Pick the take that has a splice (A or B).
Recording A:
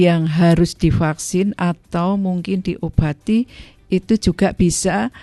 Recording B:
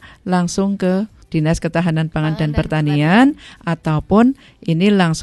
B